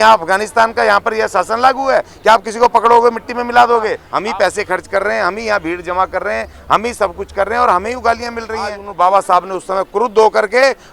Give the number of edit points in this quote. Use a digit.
2